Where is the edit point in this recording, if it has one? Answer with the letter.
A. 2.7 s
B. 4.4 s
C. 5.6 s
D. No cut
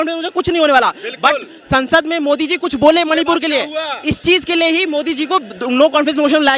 D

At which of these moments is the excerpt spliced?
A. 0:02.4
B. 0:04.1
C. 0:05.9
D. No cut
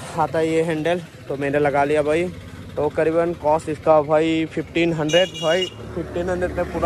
D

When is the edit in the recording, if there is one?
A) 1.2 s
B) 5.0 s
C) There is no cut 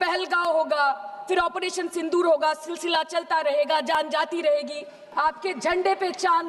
B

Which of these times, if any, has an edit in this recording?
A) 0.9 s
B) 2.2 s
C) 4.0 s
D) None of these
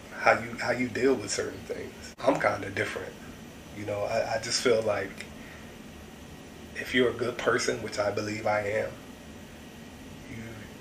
B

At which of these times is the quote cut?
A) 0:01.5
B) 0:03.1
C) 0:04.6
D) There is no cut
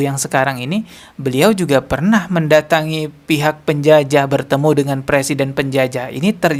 D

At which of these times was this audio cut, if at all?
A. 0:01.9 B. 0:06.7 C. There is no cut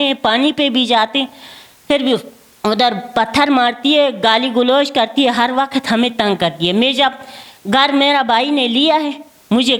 C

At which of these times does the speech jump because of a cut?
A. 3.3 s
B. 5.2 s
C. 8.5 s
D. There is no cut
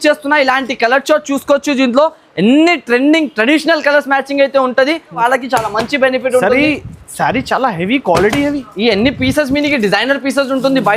B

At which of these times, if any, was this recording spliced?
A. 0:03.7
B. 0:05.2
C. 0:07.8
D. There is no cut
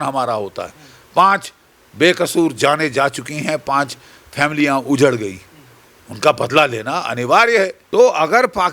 C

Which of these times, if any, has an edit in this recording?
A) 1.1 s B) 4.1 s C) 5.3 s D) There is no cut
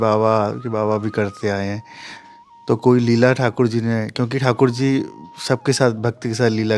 D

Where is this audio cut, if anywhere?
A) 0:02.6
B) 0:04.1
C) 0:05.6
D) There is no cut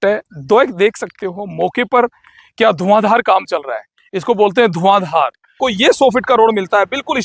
C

